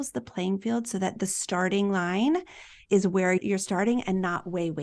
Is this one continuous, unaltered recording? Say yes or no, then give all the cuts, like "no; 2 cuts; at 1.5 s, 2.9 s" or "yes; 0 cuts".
yes; 0 cuts